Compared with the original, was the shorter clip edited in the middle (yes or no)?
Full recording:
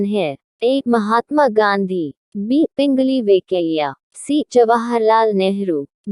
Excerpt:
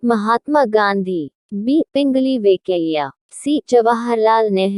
no